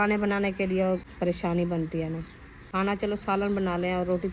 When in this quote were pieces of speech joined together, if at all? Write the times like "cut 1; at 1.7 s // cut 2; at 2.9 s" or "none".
cut 1; at 1.1 s // cut 2; at 2.6 s